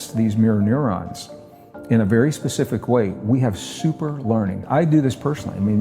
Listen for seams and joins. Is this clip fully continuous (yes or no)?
no